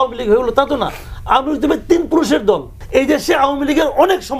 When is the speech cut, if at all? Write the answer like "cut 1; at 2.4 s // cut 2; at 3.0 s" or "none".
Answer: cut 1; at 2.7 s